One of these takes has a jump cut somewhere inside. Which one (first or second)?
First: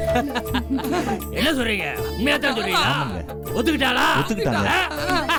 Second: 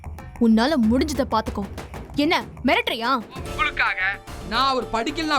second